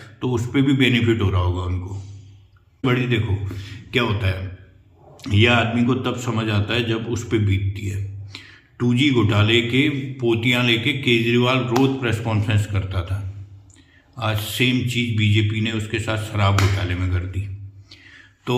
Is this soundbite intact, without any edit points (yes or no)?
no